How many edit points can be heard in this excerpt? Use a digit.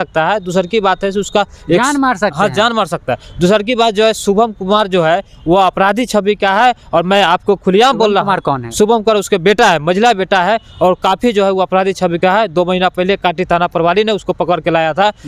0